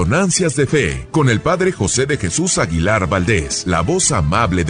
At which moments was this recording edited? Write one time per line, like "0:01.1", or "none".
0:01.0
0:03.5